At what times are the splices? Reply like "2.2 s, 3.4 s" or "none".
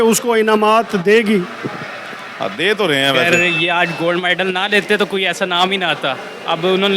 3.2 s